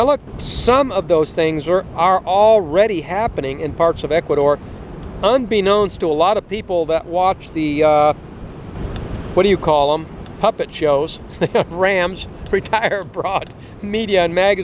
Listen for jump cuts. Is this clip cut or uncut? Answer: uncut